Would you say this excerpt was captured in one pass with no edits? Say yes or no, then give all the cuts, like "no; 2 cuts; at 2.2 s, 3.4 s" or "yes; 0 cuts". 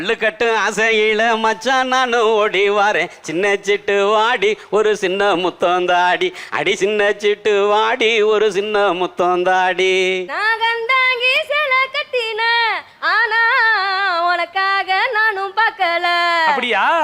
no; 1 cut; at 10.2 s